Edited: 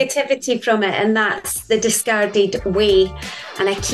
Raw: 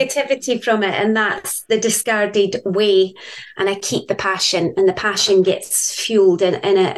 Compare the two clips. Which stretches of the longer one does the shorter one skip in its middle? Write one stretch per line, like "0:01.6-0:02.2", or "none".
none